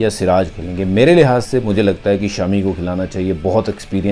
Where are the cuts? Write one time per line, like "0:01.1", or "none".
none